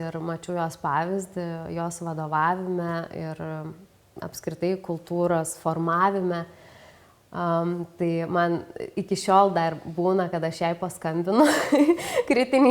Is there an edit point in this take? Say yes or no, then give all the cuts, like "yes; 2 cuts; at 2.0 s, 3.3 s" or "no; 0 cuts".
no; 0 cuts